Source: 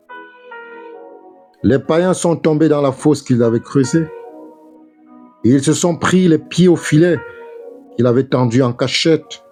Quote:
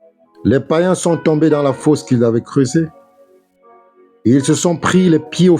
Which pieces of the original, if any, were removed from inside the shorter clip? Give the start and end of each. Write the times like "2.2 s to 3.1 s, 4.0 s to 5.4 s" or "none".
none